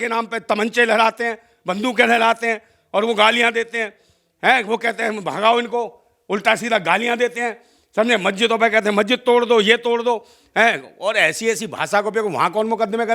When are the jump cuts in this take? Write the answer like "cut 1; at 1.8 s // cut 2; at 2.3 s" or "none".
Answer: none